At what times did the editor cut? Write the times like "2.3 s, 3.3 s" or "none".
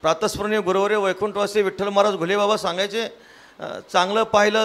none